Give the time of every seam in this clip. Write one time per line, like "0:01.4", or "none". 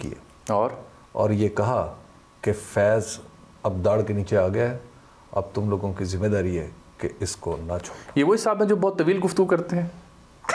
none